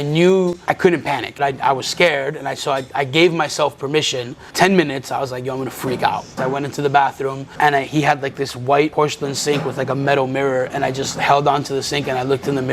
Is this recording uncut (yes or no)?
no